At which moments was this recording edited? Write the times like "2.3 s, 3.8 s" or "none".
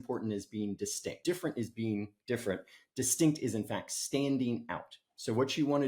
none

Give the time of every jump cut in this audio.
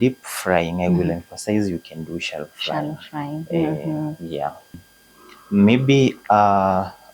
4.9 s

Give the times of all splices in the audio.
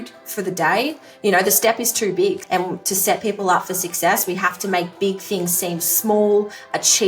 1.1 s, 2.4 s

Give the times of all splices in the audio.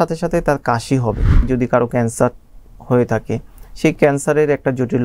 1.4 s

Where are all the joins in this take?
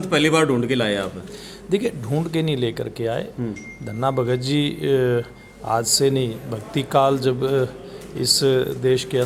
none

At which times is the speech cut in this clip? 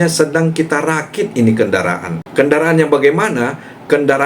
2.1 s

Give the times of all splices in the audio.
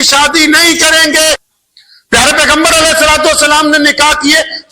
1.5 s

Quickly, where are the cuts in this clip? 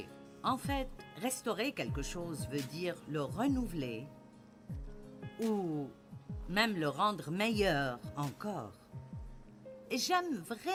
none

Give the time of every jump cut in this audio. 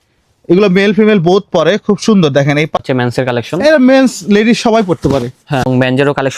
2.8 s, 5.6 s

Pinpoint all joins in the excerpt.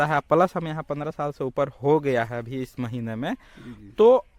none

